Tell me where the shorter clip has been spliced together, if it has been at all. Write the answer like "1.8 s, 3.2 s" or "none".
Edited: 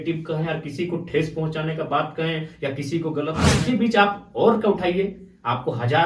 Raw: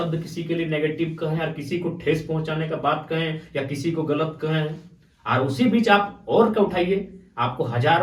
3.5 s

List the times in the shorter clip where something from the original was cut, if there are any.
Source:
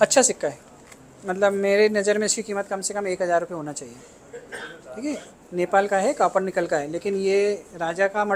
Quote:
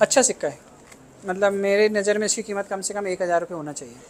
none

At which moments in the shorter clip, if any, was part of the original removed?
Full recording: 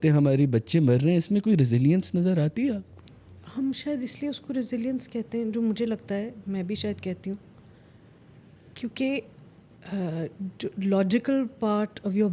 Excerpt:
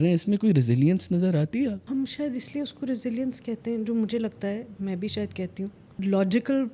1.8 s, 5.9 s

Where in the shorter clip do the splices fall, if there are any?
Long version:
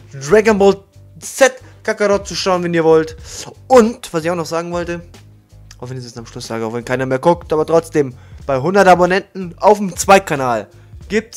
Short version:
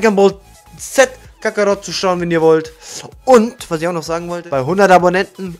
4.3 s

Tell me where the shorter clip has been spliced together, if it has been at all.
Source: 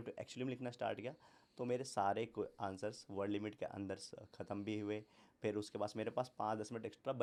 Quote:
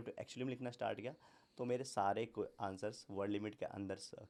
none

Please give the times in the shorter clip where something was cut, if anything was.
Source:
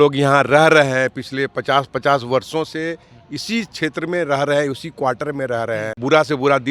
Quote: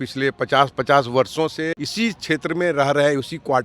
1.8 s

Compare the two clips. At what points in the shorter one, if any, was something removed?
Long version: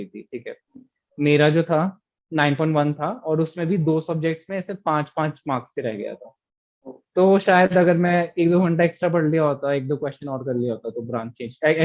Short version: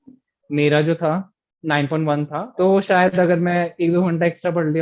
2.5 s

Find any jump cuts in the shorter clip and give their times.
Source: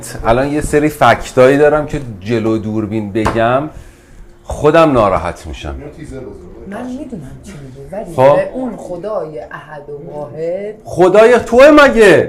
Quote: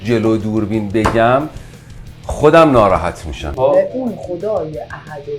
3.6 s

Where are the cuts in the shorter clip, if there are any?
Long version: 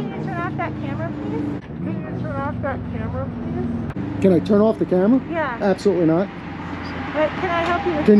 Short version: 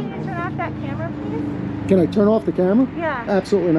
1.6 s

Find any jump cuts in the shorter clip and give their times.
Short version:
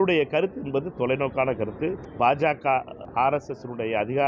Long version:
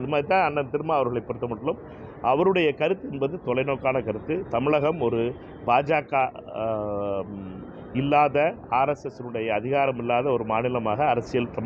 2.0 s, 3.0 s

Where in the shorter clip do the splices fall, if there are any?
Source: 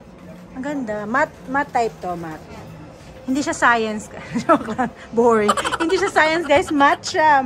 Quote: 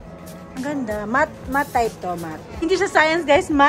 2.6 s

